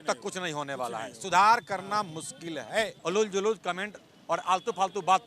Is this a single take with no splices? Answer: no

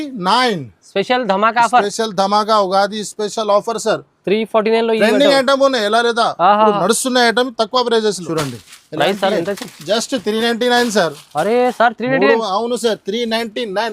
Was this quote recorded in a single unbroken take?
no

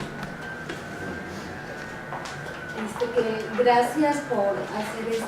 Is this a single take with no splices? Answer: no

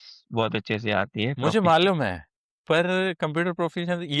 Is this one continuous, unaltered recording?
yes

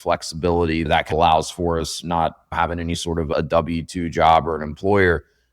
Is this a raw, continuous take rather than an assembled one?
no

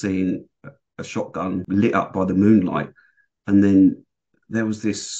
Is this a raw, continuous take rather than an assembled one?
no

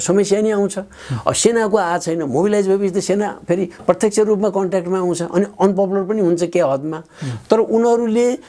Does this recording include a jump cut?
no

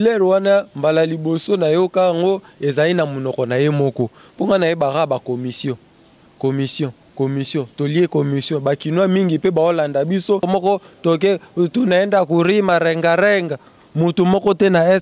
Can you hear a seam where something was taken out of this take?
yes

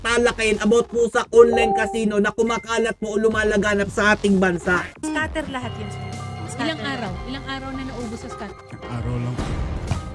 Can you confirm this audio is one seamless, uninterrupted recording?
no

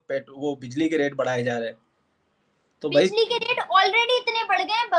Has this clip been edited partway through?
no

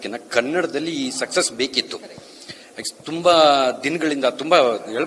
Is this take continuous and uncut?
yes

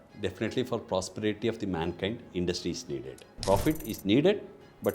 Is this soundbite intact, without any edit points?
no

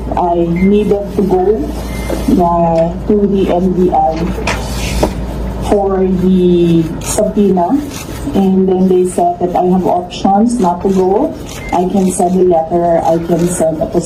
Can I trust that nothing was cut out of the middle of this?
yes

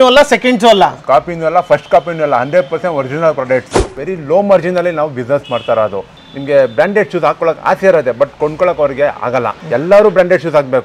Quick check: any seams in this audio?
yes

